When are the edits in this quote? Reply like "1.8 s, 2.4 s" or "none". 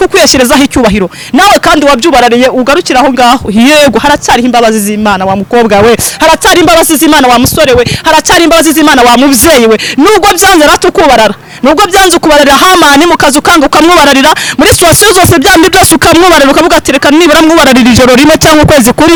none